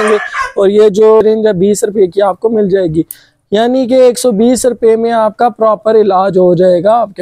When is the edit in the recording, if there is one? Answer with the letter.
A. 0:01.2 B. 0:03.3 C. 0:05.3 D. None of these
A